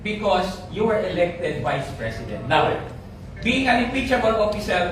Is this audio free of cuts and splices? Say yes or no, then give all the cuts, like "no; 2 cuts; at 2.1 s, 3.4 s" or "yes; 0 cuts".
yes; 0 cuts